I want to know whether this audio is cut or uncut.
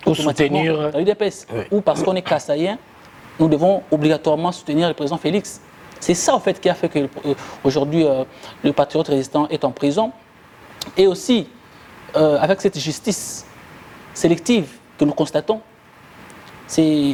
uncut